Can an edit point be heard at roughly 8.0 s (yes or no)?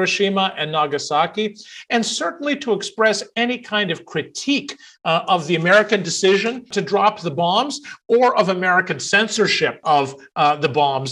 no